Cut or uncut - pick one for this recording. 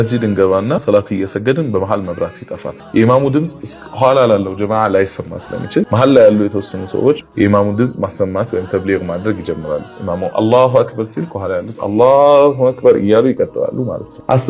cut